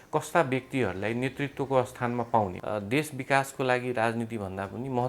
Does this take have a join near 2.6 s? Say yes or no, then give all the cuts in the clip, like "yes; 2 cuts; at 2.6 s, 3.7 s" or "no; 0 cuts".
yes; 1 cut; at 2.6 s